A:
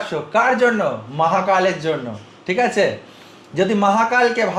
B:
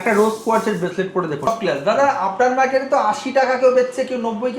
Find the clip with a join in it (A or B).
B